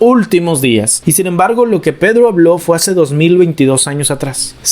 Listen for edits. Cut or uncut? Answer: cut